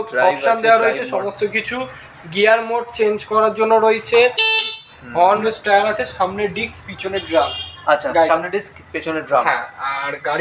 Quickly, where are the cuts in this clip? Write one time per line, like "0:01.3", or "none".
0:05.4